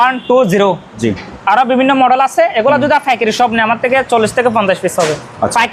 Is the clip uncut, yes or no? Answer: yes